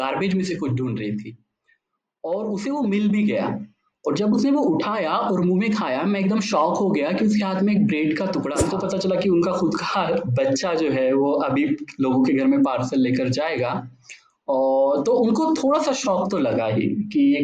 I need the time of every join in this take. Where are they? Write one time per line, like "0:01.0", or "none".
0:08.6